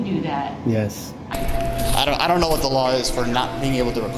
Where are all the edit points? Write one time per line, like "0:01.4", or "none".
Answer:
0:01.3